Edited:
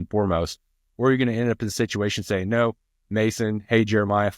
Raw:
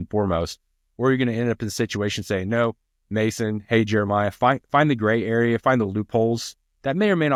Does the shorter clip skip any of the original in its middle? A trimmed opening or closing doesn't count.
no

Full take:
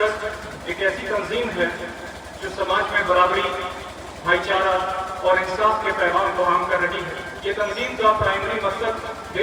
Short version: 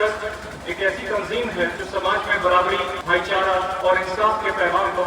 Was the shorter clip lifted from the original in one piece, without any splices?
no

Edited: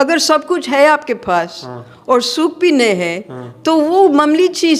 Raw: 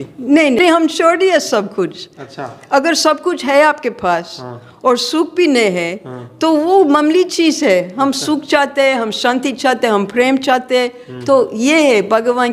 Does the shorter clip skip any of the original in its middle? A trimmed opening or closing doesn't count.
no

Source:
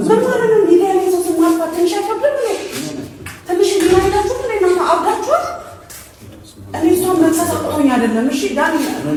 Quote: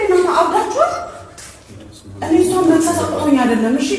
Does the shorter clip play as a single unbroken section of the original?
yes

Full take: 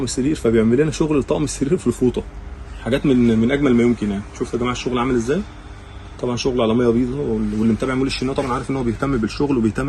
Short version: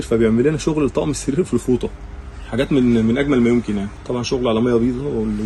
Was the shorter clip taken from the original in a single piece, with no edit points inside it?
no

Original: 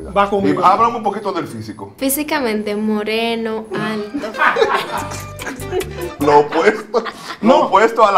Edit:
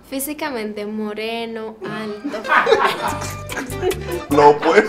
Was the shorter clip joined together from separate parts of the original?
no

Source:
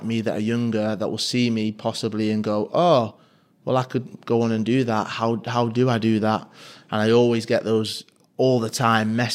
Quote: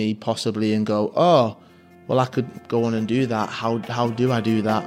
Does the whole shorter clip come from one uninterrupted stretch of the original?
yes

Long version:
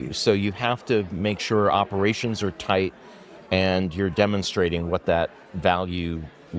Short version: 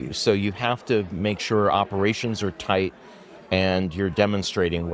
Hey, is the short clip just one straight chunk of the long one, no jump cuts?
yes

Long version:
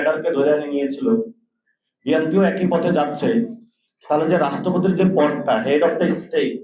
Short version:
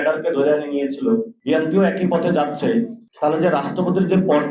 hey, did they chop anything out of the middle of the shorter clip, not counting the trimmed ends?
yes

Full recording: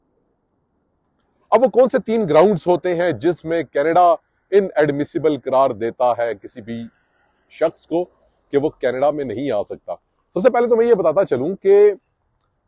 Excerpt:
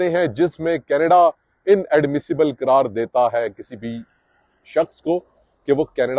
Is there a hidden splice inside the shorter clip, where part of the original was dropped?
no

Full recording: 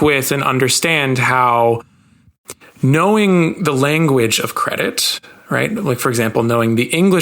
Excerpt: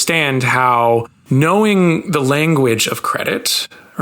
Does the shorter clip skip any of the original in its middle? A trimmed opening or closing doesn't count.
yes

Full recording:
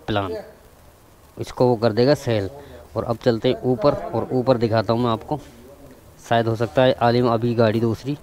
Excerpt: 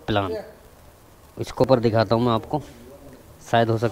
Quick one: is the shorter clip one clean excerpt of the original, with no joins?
no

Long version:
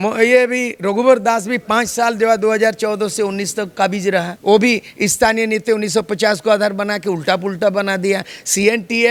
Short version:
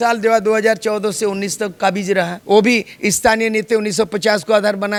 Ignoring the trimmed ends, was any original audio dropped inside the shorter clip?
no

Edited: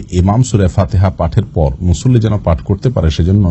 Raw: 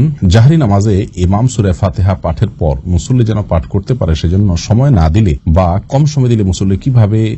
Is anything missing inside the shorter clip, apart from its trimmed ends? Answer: no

